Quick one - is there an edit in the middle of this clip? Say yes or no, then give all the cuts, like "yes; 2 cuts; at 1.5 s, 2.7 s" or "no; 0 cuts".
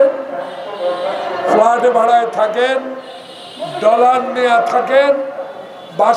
no; 0 cuts